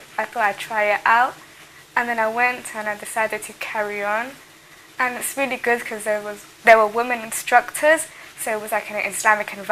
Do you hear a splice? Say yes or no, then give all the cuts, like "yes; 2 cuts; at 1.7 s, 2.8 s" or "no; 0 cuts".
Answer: yes; 1 cut; at 2.7 s